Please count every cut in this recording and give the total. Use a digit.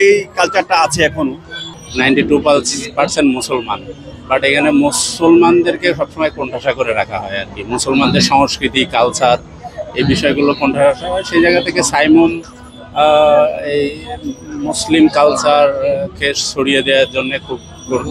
1